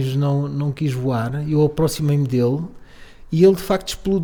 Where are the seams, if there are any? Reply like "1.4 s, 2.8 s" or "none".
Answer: none